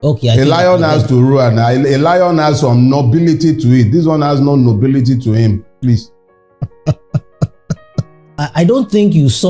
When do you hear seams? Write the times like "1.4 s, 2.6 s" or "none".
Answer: 8.4 s